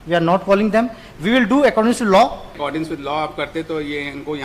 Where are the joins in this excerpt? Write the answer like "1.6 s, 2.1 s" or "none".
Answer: 2.6 s